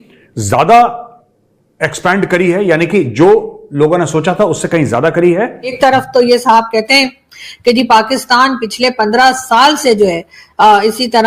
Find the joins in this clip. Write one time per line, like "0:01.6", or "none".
0:05.7